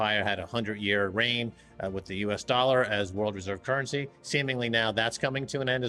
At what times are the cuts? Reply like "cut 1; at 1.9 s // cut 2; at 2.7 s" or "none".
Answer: none